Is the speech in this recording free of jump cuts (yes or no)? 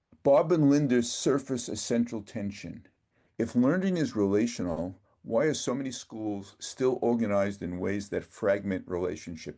yes